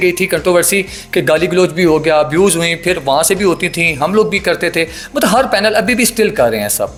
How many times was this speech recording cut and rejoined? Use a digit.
0